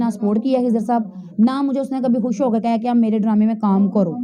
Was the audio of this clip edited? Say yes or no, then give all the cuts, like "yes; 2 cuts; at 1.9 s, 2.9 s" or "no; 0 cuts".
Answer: no; 0 cuts